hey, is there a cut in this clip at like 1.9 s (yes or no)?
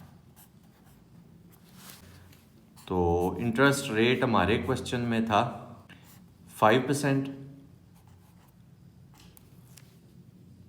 yes